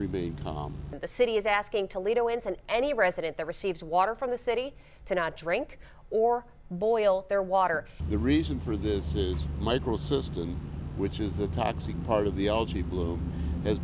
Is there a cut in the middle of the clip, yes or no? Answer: no